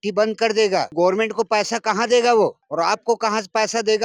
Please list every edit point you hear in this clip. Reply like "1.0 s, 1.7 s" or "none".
0.9 s